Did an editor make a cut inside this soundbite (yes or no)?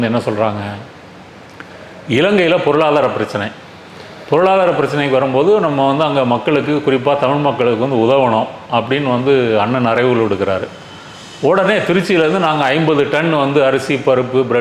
no